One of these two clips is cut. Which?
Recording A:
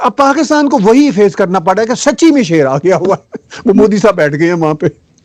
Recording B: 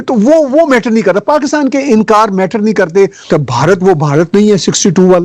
B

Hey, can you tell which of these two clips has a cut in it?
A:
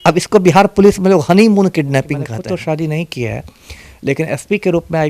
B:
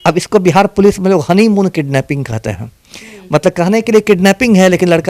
A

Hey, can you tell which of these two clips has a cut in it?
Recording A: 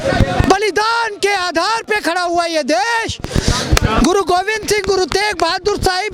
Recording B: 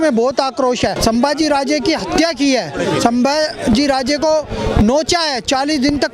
B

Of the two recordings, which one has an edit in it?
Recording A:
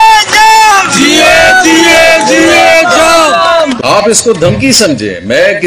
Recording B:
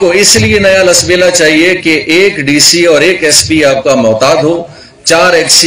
A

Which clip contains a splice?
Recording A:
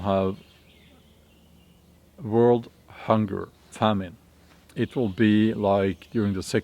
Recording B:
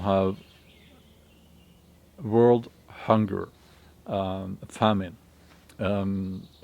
A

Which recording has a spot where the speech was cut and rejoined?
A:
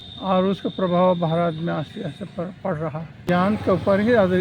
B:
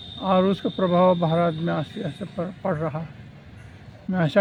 A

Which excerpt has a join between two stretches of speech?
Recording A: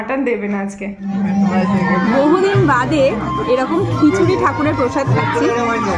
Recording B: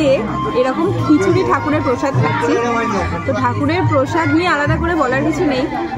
A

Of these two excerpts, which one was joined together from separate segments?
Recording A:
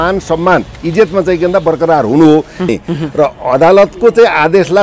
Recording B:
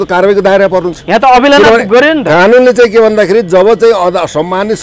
A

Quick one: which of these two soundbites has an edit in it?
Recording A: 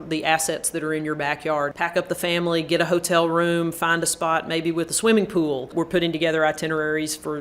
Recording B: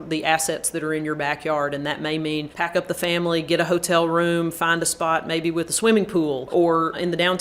A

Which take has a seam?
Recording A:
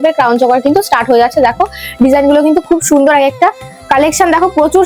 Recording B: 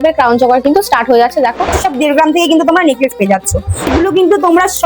B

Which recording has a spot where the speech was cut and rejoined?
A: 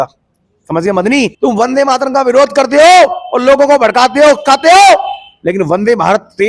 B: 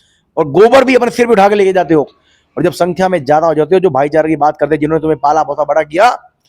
A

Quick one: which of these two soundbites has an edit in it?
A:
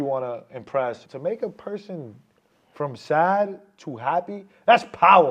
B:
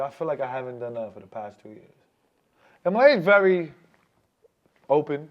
A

